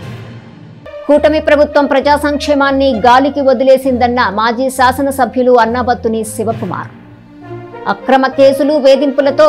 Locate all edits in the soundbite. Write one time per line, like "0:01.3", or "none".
0:01.0